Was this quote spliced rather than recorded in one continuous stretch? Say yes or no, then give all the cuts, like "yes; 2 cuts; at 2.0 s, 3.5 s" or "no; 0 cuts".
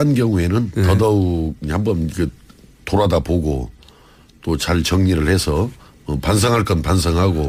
no; 0 cuts